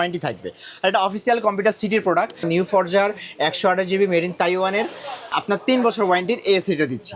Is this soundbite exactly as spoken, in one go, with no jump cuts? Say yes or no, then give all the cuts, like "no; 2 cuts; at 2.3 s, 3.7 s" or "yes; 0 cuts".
no; 1 cut; at 2.5 s